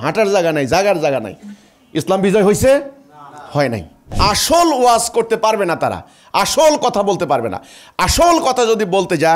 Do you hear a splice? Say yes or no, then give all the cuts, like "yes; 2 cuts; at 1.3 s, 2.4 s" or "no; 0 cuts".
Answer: yes; 1 cut; at 4.0 s